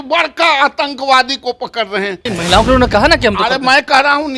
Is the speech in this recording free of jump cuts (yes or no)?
no